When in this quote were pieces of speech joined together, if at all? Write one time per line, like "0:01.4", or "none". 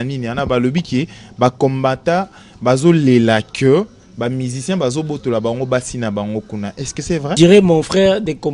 0:07.4